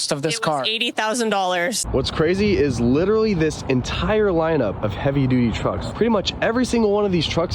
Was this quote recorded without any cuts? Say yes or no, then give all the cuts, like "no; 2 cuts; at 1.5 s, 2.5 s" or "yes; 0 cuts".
no; 3 cuts; at 1.8 s, 4.8 s, 5.9 s